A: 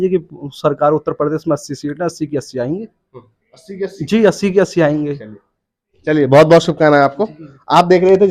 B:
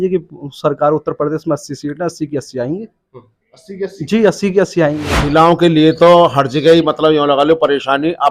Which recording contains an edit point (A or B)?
B